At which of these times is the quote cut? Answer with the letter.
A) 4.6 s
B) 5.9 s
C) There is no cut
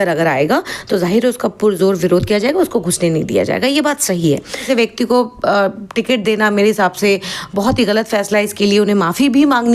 A